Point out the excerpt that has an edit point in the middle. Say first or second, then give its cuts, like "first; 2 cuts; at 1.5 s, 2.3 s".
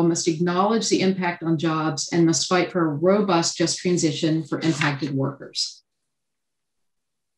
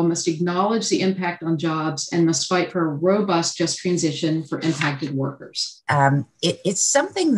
second; 1 cut; at 5.8 s